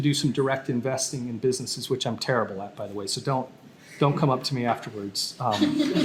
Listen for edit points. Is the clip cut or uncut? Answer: uncut